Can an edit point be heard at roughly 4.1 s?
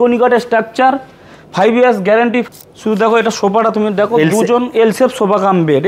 no; 1 cut; at 2.5 s

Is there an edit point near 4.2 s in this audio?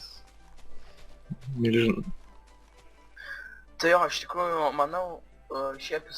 yes; 1 cut; at 4.2 s

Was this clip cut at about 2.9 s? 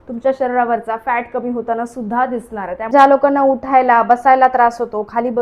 yes; 1 cut; at 2.9 s

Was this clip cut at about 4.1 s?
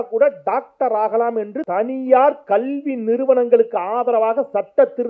no; 1 cut; at 1.6 s

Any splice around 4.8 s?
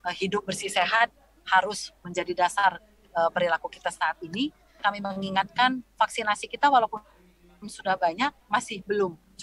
yes; 1 cut; at 4.8 s

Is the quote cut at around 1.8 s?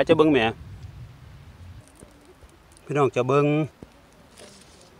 yes; 1 cut; at 1.8 s

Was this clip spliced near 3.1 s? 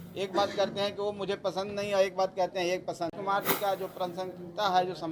yes; 1 cut; at 3.1 s

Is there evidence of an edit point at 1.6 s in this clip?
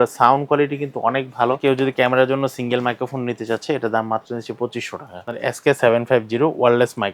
yes; 2 cuts; at 1.6 s, 5.3 s

